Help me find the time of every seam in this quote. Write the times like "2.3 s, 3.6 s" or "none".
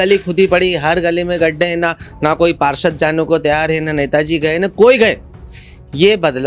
none